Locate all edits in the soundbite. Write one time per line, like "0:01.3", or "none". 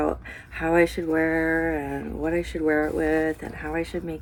none